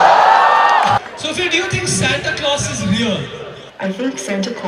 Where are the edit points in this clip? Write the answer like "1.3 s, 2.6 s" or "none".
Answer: 1.0 s, 3.6 s